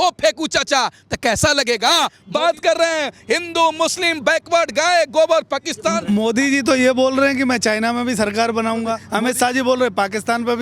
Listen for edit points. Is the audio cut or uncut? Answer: cut